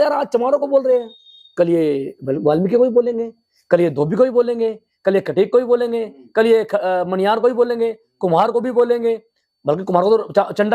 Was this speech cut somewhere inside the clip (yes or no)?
no